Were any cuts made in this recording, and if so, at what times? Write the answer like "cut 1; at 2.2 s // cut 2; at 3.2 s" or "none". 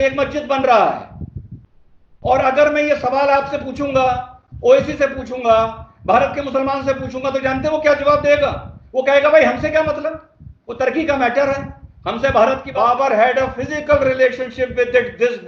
cut 1; at 12.7 s